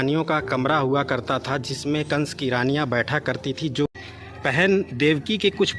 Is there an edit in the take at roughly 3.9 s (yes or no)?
yes